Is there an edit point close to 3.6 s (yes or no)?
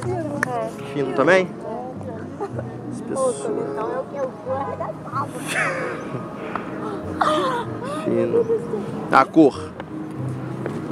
no